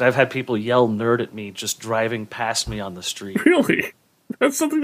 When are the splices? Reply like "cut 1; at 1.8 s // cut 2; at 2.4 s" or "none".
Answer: none